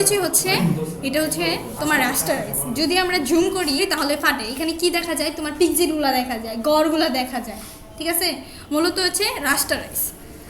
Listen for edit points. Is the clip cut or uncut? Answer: cut